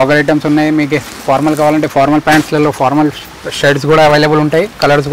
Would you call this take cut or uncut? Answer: uncut